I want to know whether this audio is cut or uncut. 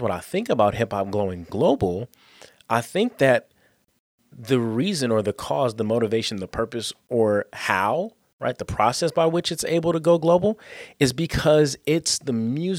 cut